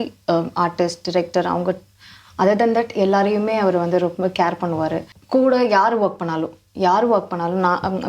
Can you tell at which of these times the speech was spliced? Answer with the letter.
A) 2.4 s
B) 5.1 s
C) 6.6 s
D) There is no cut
B